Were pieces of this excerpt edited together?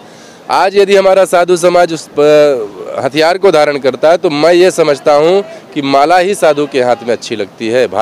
no; 0 cuts

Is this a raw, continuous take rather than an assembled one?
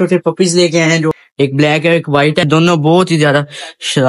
no; 2 cuts; at 1.2 s, 2.5 s

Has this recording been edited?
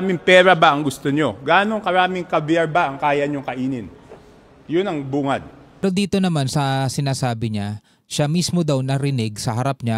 yes; 1 cut; at 5.8 s

